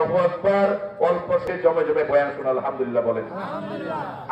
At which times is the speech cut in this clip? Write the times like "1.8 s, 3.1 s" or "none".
1.4 s